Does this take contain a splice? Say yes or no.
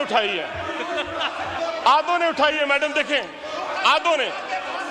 no